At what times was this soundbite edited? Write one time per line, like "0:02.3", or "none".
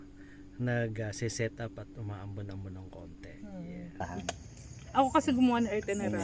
0:04.0